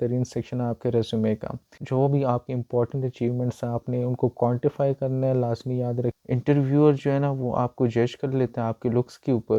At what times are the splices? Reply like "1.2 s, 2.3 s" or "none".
1.8 s, 6.2 s